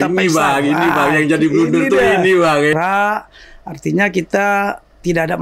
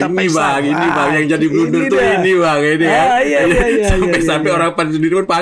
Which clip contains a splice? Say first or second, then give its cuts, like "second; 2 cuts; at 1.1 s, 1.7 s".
first; 1 cut; at 2.7 s